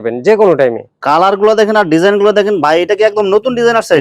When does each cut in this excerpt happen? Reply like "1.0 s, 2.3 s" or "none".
0.9 s